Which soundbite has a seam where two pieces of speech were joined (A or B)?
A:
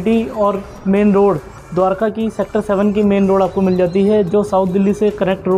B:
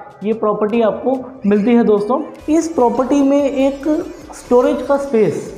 B